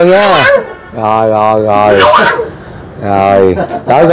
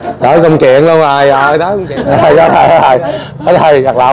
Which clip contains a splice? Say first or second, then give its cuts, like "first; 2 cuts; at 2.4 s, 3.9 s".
second; 1 cut; at 1.7 s